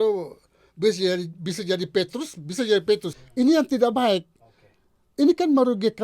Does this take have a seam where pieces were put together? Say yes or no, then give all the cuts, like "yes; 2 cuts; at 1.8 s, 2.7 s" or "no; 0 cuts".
yes; 1 cut; at 3.2 s